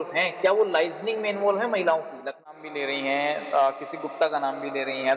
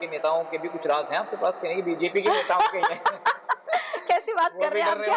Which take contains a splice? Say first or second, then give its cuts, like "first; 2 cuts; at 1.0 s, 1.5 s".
first; 1 cut; at 2.5 s